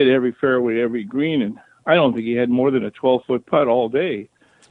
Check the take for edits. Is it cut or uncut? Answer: uncut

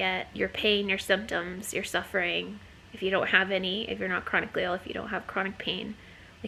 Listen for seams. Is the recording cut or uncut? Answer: uncut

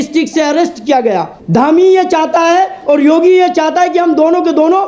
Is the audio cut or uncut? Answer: cut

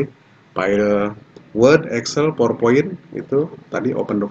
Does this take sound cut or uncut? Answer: uncut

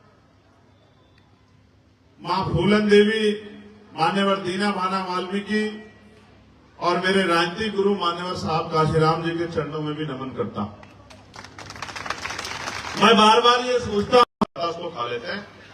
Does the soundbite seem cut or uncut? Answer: cut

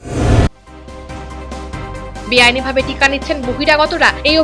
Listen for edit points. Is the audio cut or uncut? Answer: cut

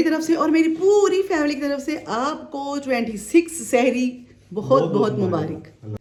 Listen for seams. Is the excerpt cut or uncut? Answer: uncut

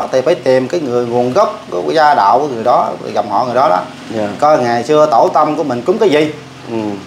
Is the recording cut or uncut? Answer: uncut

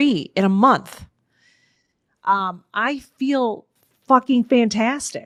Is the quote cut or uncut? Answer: uncut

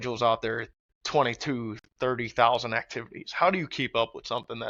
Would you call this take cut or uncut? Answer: uncut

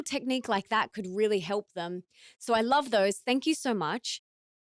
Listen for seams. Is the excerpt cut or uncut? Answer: uncut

